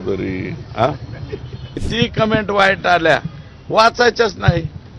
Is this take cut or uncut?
cut